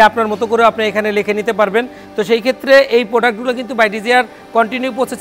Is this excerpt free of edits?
yes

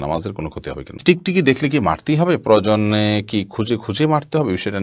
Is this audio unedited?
no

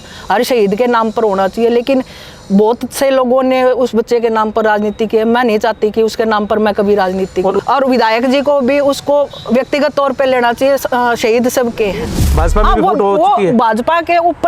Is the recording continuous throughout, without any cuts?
no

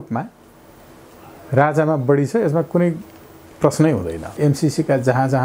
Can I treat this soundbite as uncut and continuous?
no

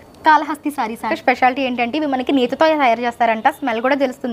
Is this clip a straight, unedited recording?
no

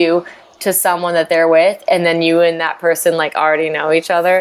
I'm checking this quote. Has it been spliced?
no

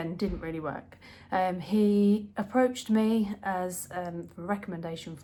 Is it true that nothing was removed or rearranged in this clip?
yes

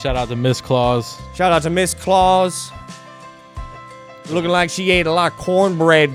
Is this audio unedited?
yes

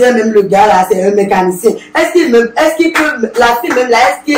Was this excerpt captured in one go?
yes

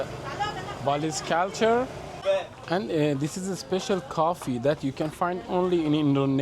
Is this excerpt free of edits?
no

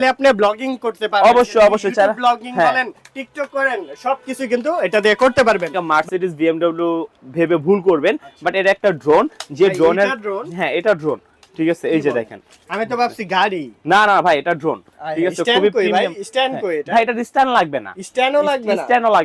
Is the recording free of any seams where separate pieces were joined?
no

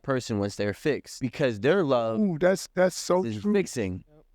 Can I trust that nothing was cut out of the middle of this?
no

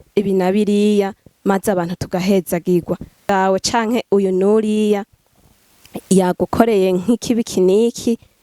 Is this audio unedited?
no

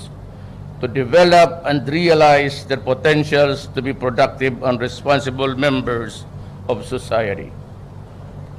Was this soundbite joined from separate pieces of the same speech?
no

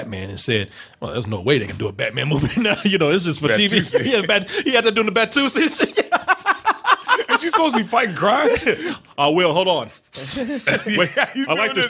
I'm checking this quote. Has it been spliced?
no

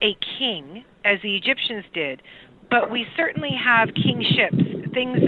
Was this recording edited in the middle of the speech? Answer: no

